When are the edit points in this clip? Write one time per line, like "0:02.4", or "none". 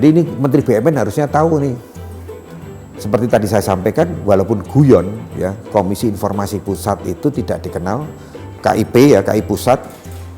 0:02.4